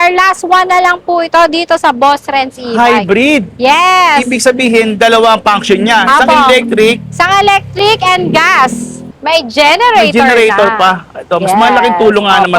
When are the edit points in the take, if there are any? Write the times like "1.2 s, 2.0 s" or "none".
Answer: 9.1 s